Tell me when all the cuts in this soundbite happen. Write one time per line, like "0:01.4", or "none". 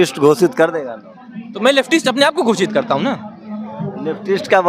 none